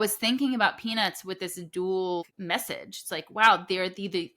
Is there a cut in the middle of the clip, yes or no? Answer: yes